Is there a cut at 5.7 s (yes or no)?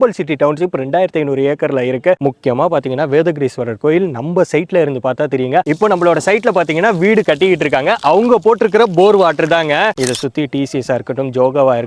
yes